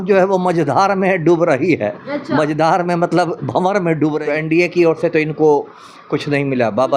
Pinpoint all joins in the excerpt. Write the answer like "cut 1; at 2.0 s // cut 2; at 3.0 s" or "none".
cut 1; at 4.2 s